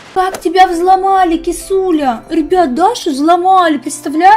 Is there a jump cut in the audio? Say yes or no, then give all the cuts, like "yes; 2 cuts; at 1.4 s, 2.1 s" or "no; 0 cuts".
no; 0 cuts